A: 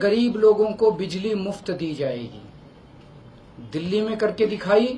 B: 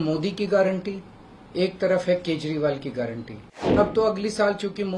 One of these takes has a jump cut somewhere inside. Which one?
B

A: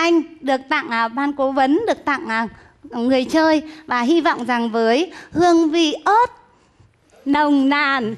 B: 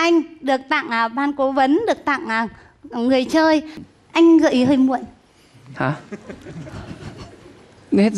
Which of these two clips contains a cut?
B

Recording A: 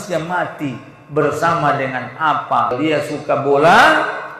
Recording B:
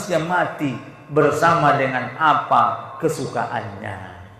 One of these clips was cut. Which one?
A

